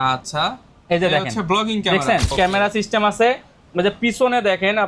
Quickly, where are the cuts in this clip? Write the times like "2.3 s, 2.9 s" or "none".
2.3 s